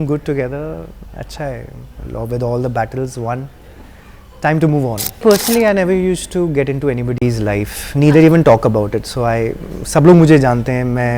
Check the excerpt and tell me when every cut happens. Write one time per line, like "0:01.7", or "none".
0:05.2